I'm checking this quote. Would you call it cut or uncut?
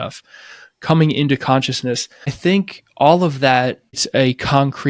cut